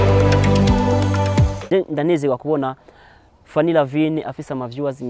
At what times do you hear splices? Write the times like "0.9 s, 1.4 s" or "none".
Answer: 1.1 s